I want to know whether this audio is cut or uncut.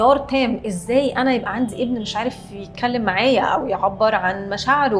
uncut